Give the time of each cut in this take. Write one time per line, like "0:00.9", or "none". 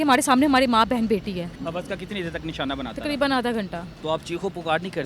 0:01.5
0:03.9